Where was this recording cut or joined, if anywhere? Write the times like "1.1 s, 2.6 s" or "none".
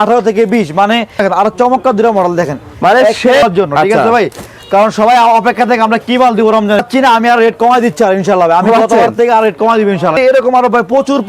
1.2 s, 3.4 s, 6.9 s, 10.1 s